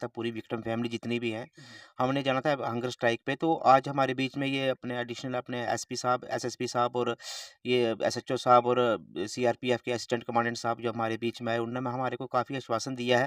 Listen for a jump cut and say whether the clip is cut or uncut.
uncut